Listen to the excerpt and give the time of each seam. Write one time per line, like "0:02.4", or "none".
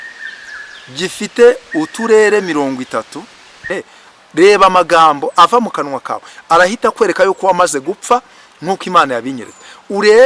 0:03.7